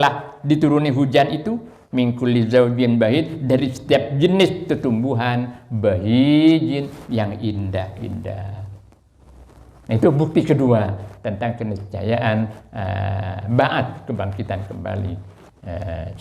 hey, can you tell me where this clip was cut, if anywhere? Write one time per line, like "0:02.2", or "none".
none